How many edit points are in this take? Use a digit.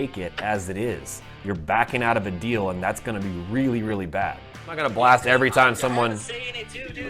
1